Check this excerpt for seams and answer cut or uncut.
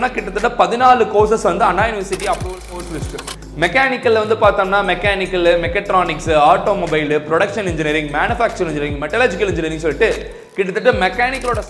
cut